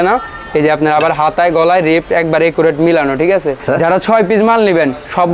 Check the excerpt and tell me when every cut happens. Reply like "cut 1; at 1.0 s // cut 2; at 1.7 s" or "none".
cut 1; at 3.6 s